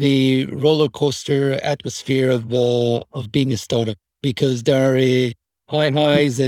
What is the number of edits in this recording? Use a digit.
0